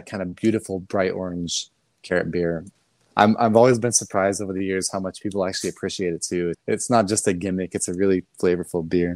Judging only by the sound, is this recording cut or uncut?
cut